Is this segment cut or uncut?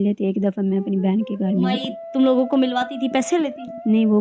uncut